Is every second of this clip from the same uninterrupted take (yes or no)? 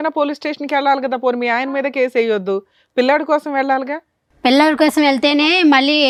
yes